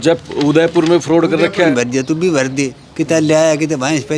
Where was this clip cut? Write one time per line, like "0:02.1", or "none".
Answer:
0:01.7